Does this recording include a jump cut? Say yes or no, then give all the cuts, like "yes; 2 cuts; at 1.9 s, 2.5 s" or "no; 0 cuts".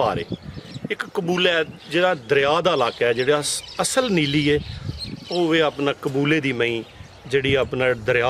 no; 0 cuts